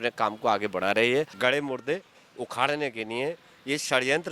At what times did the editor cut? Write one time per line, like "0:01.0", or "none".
0:01.3